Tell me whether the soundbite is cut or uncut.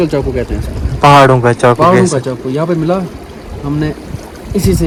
uncut